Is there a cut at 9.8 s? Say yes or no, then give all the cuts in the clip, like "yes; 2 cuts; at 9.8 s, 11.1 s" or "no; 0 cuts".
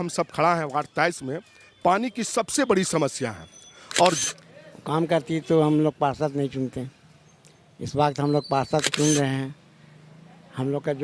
no; 1 cut; at 4.2 s